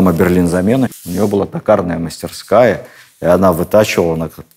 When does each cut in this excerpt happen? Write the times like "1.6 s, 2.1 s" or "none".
1.0 s